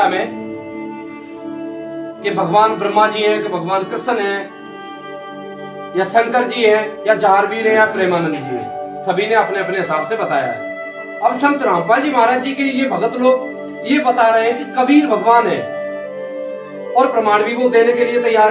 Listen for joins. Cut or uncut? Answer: uncut